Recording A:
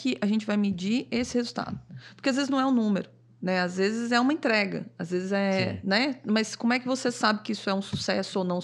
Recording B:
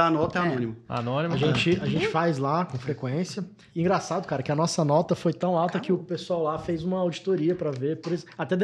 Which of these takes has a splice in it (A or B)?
B